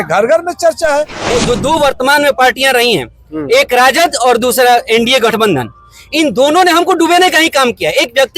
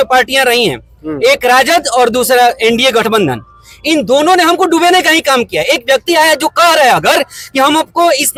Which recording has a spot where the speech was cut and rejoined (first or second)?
first